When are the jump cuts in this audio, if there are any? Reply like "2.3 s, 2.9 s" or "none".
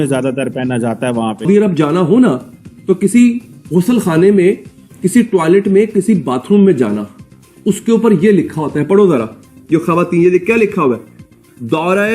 1.5 s